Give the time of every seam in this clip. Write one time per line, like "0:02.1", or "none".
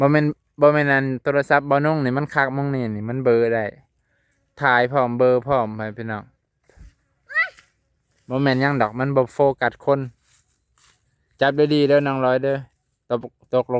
none